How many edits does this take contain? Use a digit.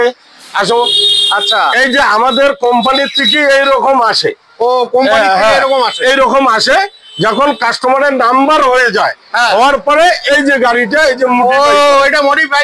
0